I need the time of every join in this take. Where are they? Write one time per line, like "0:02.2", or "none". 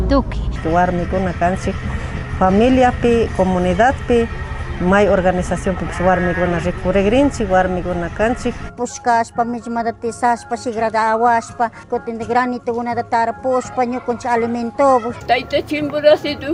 none